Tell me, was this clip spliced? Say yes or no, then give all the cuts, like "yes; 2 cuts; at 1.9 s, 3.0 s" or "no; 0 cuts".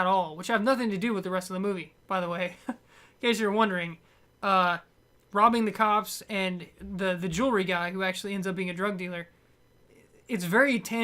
yes; 1 cut; at 4.6 s